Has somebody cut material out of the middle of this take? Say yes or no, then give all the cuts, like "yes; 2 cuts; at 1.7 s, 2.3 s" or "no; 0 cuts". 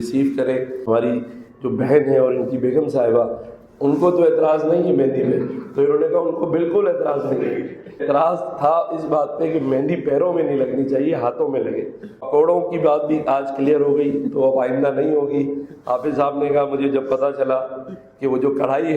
yes; 3 cuts; at 0.8 s, 8.0 s, 12.3 s